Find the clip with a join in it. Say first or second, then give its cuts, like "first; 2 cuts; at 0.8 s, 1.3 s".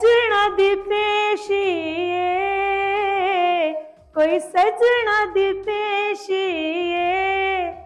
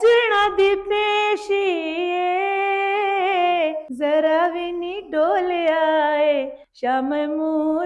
second; 1 cut; at 3.8 s